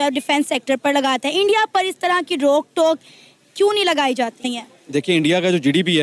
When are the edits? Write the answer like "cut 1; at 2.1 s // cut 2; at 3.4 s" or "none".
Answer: cut 1; at 4.6 s